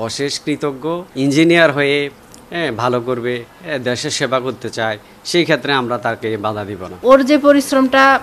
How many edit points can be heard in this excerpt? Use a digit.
2